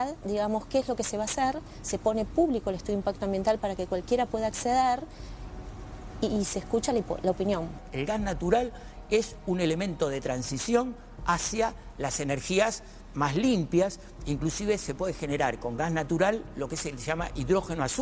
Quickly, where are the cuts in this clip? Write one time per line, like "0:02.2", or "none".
0:07.8